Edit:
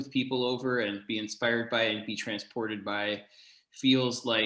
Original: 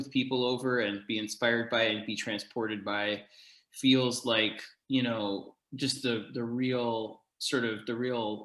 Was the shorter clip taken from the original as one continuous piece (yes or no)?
yes